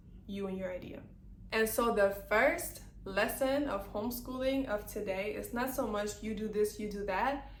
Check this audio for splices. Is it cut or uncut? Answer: uncut